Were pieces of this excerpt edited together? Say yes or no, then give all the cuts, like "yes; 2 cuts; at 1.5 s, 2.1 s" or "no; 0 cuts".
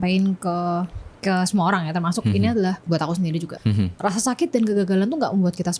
no; 0 cuts